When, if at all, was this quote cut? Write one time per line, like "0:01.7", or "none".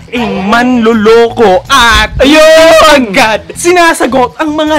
none